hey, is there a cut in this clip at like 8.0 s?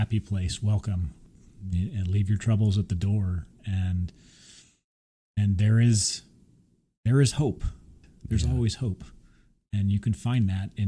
yes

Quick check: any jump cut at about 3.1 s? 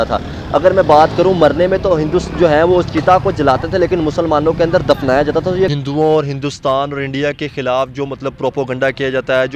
no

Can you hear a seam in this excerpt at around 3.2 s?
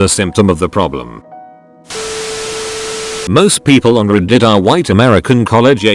yes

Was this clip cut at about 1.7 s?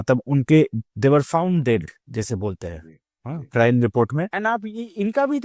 no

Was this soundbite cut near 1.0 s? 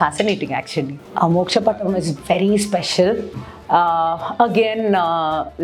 yes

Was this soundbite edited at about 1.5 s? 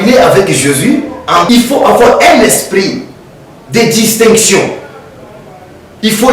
yes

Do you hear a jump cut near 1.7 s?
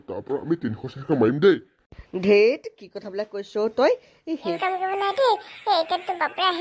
no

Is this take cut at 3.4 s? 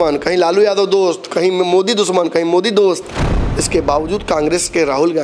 yes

